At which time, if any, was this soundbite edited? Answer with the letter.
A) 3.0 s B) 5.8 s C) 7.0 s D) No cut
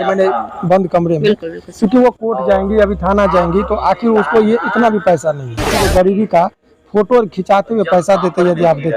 B